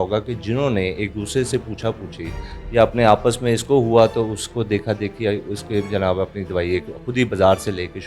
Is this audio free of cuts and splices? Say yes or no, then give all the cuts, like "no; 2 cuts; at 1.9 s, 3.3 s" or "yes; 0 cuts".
yes; 0 cuts